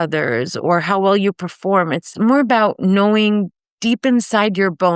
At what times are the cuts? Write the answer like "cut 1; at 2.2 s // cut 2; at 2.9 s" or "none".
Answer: cut 1; at 2.1 s